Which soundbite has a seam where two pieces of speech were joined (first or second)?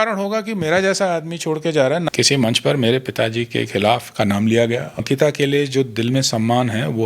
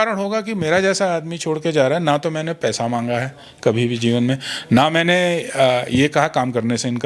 first